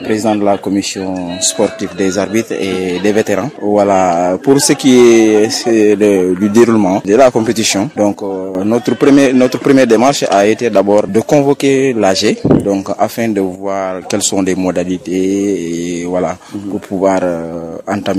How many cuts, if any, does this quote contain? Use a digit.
5